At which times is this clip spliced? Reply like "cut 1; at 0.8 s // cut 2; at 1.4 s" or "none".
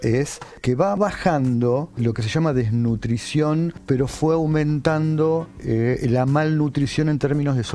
cut 1; at 1.0 s // cut 2; at 2.0 s // cut 3; at 3.8 s